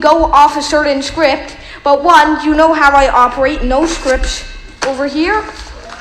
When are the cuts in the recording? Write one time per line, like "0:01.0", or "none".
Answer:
none